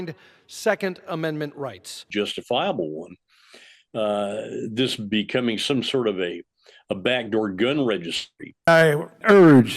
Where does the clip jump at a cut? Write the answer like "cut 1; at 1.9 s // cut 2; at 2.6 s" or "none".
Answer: cut 1; at 2.0 s // cut 2; at 8.5 s